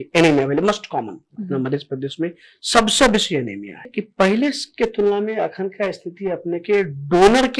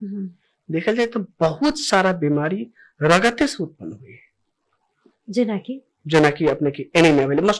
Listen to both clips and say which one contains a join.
first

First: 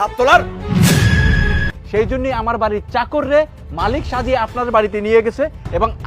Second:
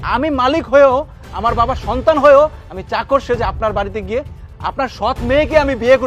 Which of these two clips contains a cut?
first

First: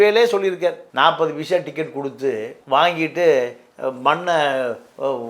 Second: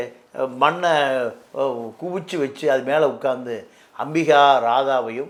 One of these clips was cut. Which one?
first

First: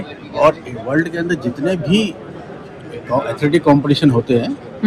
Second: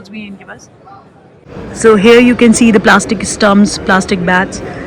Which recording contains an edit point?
second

